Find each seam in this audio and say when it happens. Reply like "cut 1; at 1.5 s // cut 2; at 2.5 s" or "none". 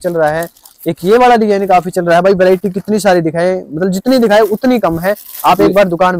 none